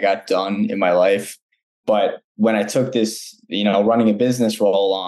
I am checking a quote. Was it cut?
no; 0 cuts

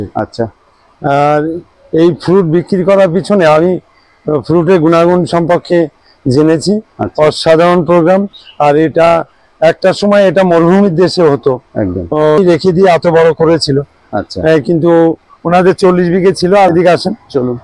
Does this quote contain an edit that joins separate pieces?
yes; 2 cuts; at 12.4 s, 16.7 s

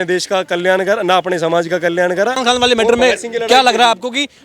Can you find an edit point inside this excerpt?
yes; 1 cut; at 2.4 s

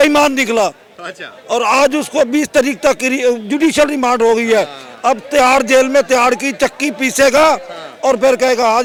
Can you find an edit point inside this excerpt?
no; 0 cuts

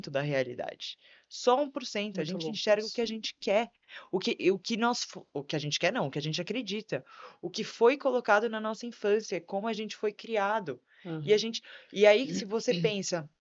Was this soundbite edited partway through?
no; 0 cuts

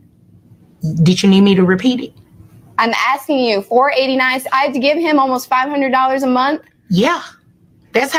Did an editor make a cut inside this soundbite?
no; 0 cuts

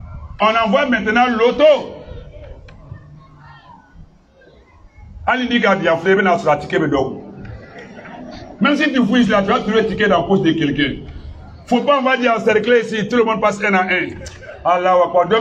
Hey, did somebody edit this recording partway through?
no; 0 cuts

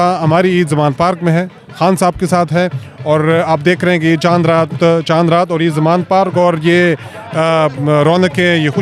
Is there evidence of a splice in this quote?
no; 0 cuts

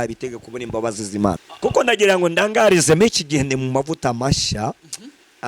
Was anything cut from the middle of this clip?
yes; 1 cut; at 1.5 s

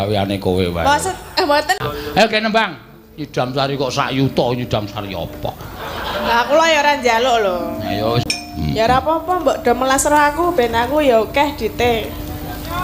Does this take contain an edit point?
yes; 2 cuts; at 1.8 s, 8.3 s

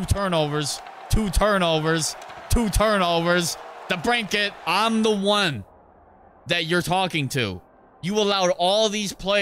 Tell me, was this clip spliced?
yes; 1 cut; at 4.5 s

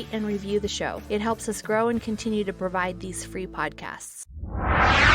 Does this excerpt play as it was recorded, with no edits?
no; 1 cut; at 4.2 s

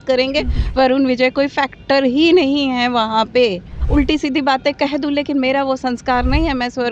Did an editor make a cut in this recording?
yes; 1 cut; at 3.7 s

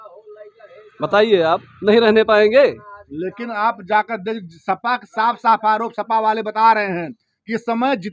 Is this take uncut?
yes; 0 cuts

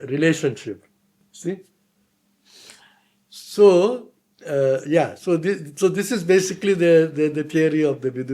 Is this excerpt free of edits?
yes; 0 cuts

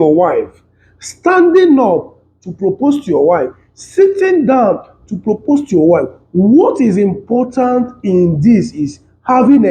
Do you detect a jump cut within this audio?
no; 0 cuts

